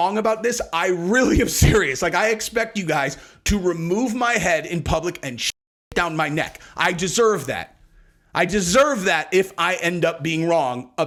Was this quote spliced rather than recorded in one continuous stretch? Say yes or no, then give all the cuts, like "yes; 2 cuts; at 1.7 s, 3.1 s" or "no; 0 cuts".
no; 0 cuts